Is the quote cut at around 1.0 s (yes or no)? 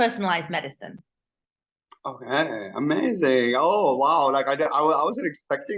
no